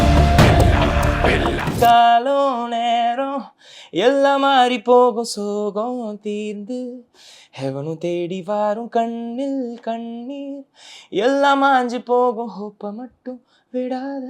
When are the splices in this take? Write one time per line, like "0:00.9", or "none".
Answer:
0:01.7